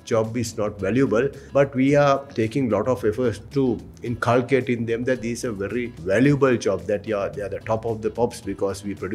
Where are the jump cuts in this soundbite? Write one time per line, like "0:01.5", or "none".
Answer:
0:01.4
0:03.4
0:06.0